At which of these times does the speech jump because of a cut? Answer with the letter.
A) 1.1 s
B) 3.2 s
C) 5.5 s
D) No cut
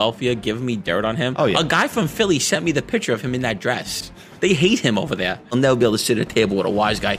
C